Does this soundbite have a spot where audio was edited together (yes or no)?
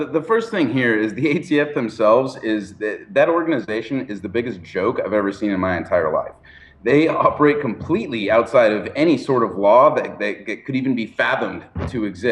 yes